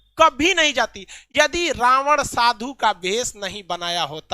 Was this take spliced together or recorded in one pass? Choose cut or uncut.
uncut